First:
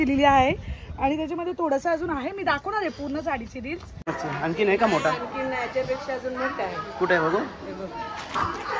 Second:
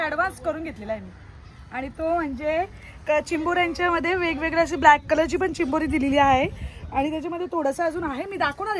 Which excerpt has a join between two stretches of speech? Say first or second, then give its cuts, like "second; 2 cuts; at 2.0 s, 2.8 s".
first; 1 cut; at 4.1 s